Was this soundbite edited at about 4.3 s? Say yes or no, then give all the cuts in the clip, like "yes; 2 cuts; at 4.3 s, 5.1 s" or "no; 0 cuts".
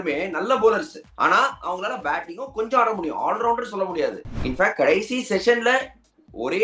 yes; 1 cut; at 4.3 s